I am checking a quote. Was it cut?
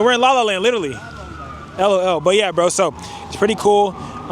no; 0 cuts

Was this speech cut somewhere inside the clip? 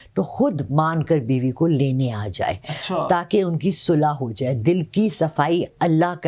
no; 0 cuts

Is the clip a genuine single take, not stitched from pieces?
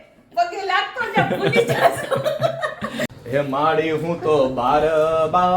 no; 1 cut; at 3.1 s

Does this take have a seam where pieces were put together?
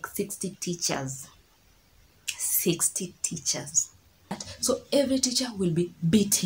yes; 1 cut; at 4.5 s

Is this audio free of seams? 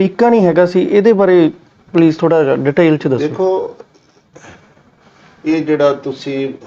yes; 0 cuts

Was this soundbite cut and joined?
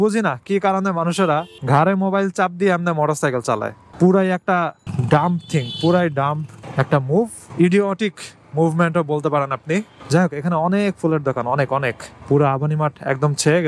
no; 0 cuts

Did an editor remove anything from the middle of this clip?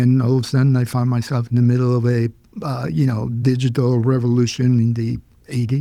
no; 0 cuts

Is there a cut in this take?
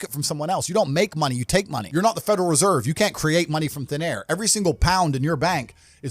yes; 1 cut; at 1.8 s

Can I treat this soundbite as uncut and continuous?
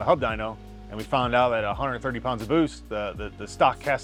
yes; 0 cuts

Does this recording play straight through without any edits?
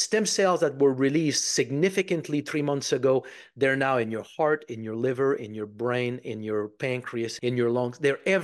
no; 1 cut; at 7.3 s

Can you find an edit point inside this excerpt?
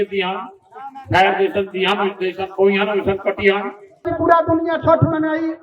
yes; 1 cut; at 4.1 s

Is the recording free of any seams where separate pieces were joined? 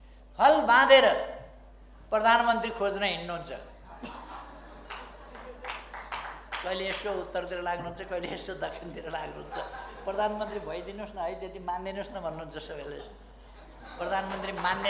yes; 0 cuts

